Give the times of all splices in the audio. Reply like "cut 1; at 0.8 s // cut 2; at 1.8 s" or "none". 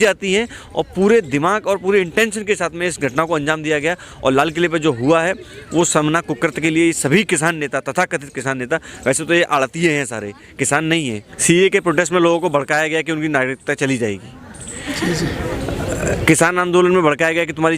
cut 1; at 11.3 s